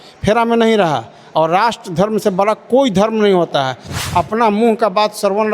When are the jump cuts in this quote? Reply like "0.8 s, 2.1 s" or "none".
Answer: 4.0 s

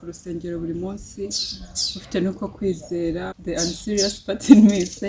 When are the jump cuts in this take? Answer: 3.4 s

